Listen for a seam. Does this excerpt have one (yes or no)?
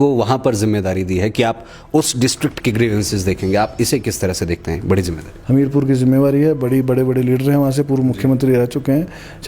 yes